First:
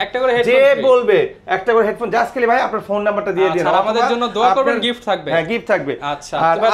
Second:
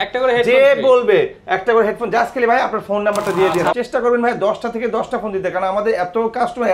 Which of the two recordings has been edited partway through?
second; 1 cut; at 3.7 s

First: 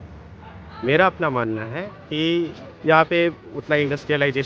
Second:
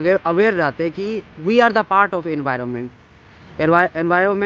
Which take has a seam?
first; 1 cut; at 2.6 s

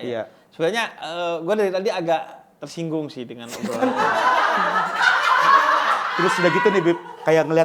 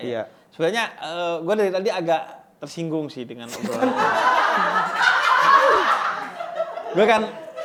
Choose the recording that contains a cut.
first; 1 cut; at 6.1 s

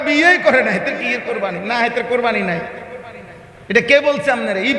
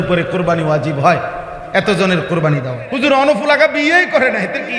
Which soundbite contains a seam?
second; 1 cut; at 2.8 s

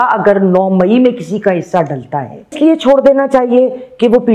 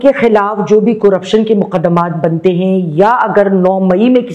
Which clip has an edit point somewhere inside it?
first; 1 cut; at 2.5 s

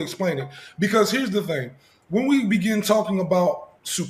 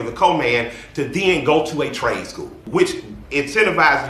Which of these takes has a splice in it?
second; 1 cut; at 2.6 s

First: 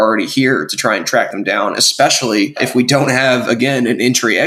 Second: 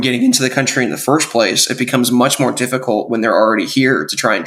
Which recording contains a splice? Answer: first; 1 cut; at 2.7 s

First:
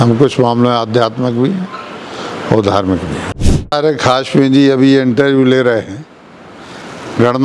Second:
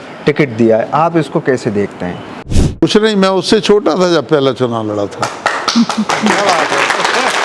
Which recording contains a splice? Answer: first; 1 cut; at 3.7 s

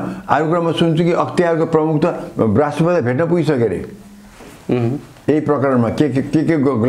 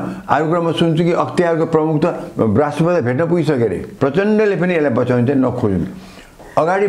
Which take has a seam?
second; 1 cut; at 3.9 s

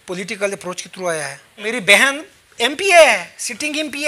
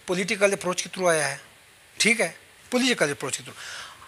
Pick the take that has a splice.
first; 1 cut; at 1.6 s

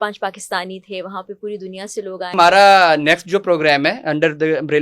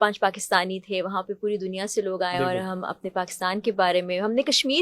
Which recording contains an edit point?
first; 1 cut; at 2.3 s

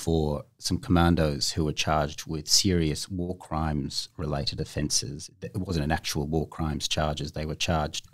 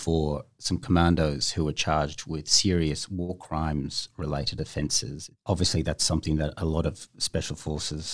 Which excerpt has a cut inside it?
second; 1 cut; at 5.3 s

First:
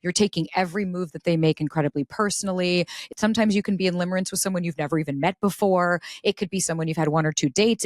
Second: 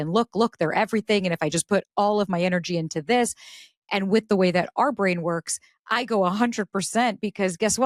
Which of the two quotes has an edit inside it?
first; 1 cut; at 3.1 s

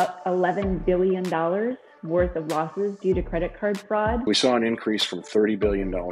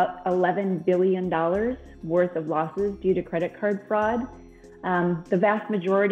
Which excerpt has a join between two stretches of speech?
first; 1 cut; at 4.3 s

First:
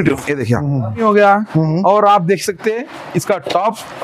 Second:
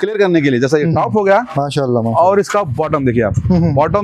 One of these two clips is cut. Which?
first; 1 cut; at 1.0 s

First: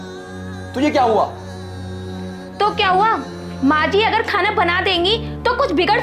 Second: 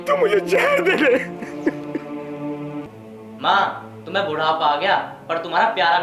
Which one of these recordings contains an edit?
second; 1 cut; at 2.8 s

